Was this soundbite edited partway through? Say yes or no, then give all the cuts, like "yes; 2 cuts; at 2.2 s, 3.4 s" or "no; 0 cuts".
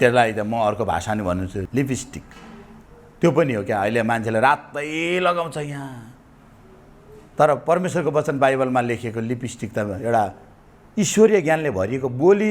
yes; 1 cut; at 1.6 s